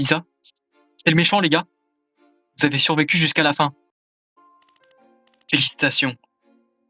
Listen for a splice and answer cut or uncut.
cut